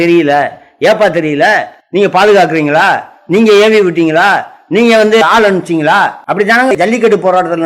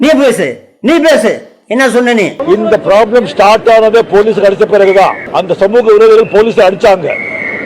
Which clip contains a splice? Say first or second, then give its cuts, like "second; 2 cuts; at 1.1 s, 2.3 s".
first; 2 cuts; at 1.8 s, 6.7 s